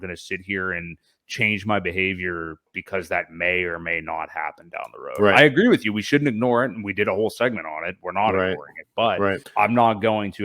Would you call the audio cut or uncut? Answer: cut